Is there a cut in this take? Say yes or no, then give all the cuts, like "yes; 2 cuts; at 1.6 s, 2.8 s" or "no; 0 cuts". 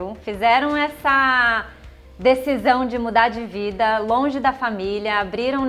no; 0 cuts